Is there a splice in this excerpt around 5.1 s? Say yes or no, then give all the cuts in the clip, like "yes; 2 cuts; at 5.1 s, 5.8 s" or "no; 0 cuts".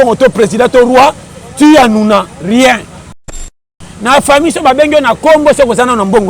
no; 1 cut; at 3.3 s